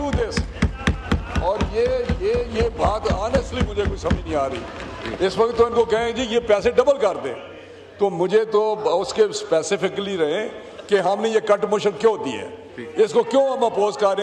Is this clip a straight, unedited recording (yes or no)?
yes